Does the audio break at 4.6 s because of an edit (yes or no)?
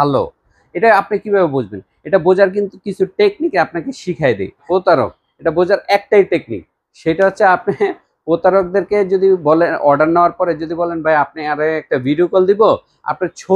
yes